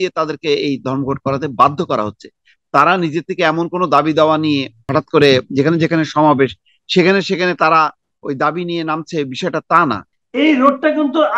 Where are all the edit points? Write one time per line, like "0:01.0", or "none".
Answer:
0:04.8
0:10.1